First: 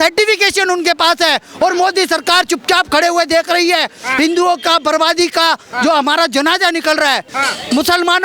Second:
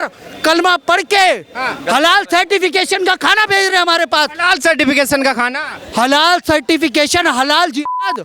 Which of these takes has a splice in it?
first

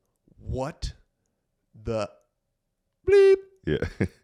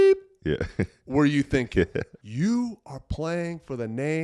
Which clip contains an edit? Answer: second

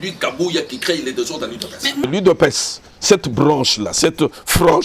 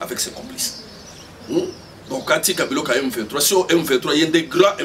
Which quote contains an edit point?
first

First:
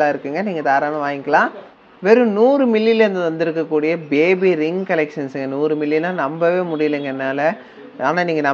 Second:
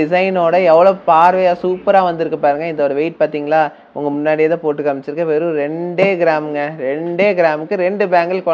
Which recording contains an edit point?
first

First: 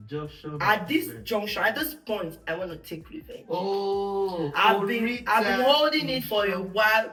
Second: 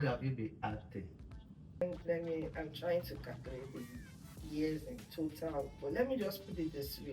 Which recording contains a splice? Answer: second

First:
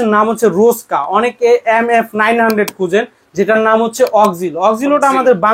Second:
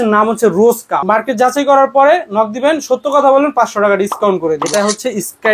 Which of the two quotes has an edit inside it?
second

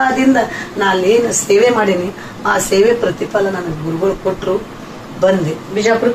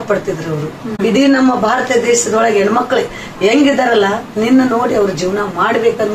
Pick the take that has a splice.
second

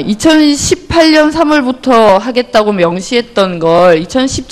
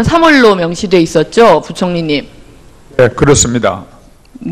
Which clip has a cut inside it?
second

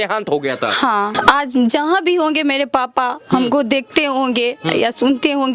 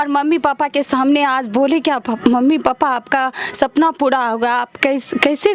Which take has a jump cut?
first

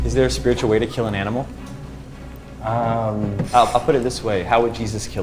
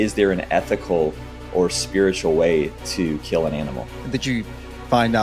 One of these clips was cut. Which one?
second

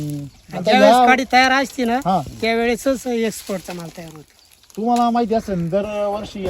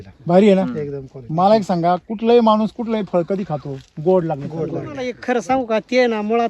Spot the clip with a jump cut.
second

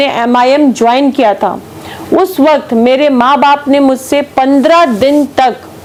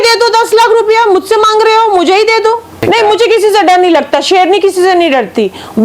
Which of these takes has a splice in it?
second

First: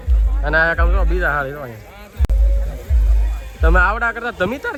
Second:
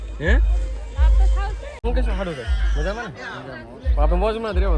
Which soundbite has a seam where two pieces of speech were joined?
second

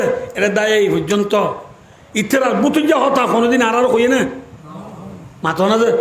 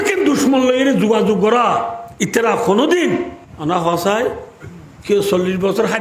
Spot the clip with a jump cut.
second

